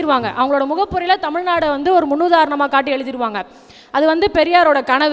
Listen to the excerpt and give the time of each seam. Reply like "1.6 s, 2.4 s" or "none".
none